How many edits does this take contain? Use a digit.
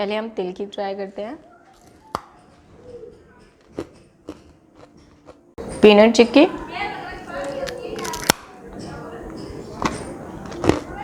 1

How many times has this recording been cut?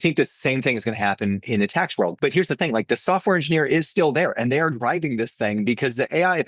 1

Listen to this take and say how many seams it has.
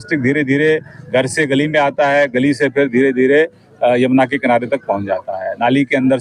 0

